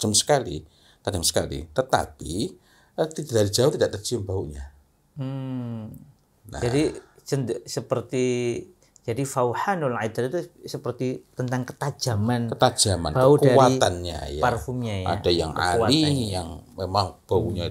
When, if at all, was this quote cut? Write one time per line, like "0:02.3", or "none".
none